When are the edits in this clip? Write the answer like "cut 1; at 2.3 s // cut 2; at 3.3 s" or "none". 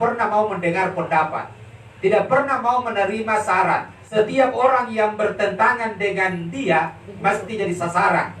cut 1; at 4.0 s